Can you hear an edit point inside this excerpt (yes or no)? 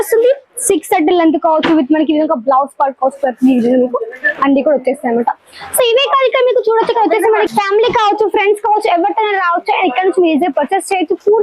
no